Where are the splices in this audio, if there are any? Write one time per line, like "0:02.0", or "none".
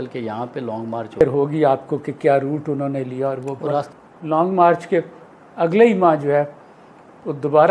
0:01.2
0:03.9

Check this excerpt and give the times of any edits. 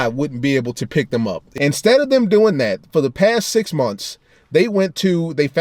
0:01.4

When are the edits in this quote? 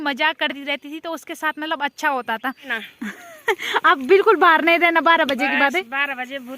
0:02.8

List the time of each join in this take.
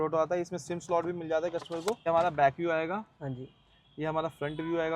0:02.1

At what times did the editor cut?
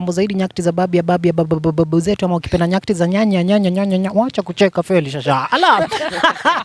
none

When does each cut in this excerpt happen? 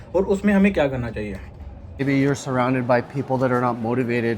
0:02.0

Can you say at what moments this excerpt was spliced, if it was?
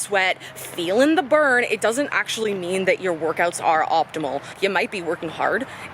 0:04.5

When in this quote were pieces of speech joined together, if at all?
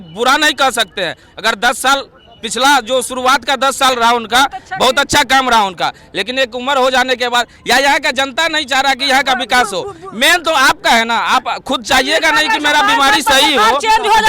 none

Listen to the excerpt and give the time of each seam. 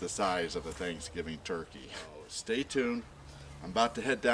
0:02.3

